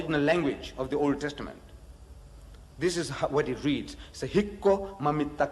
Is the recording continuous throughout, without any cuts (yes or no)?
yes